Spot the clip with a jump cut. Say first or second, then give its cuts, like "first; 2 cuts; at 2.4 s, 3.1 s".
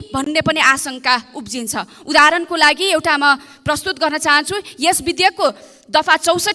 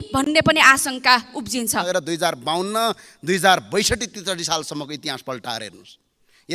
second; 1 cut; at 1.9 s